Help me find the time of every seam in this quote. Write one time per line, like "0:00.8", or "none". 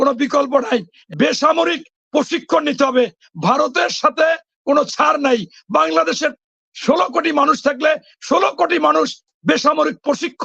0:01.0